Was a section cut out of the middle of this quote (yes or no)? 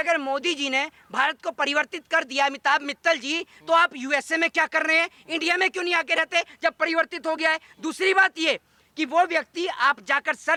no